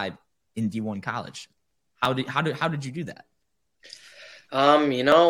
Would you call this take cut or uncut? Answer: uncut